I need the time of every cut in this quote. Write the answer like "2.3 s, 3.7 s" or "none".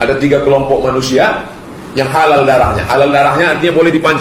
none